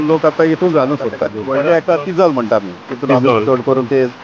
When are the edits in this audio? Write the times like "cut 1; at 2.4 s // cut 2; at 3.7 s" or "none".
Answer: cut 1; at 1.4 s